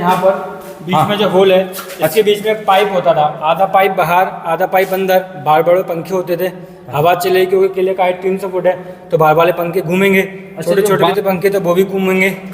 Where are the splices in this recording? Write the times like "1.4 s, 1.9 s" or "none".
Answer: 11.1 s